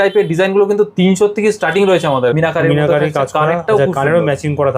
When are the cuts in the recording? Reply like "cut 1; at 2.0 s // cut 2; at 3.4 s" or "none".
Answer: cut 1; at 2.3 s